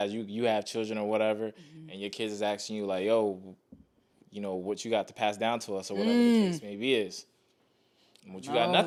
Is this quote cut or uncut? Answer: uncut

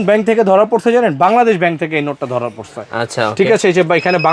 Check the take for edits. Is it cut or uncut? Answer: uncut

